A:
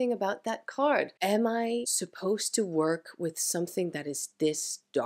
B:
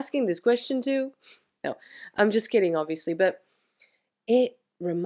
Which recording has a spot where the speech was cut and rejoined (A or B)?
A